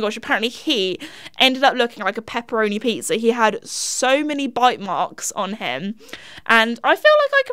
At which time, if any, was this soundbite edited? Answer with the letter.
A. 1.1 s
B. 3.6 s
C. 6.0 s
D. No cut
D